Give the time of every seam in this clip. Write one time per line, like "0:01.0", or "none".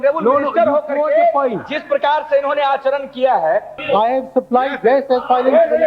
0:03.7